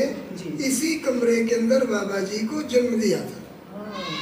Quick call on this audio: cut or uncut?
uncut